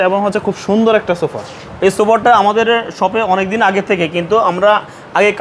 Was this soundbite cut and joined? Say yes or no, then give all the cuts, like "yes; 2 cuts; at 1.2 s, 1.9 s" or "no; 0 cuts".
no; 0 cuts